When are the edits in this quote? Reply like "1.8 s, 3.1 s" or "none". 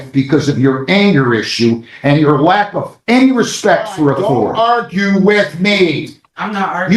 4.5 s

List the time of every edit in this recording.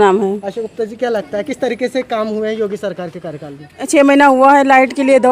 3.8 s

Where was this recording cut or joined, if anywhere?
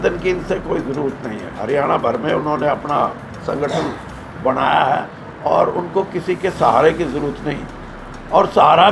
1.5 s

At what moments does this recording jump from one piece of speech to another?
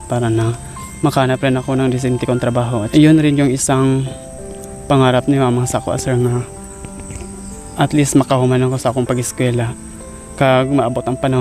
2.9 s

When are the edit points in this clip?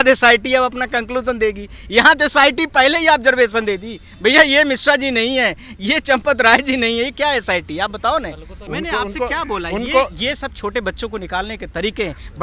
8.7 s

